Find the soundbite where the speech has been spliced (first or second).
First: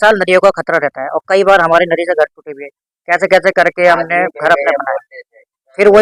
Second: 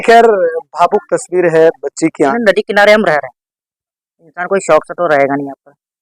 second